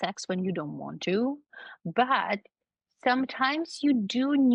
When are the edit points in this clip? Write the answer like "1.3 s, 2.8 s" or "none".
none